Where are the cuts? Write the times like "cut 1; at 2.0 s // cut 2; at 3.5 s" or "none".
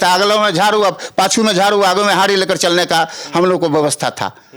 none